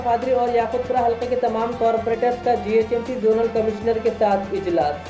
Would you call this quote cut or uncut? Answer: uncut